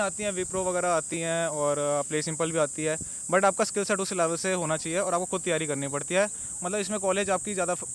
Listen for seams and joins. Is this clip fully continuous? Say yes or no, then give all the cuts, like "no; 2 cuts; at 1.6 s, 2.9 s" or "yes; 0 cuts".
yes; 0 cuts